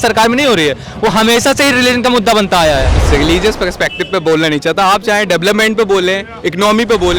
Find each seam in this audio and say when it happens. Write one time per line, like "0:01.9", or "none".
0:03.0